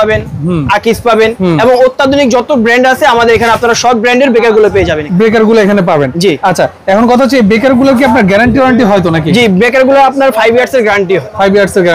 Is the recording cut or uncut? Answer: uncut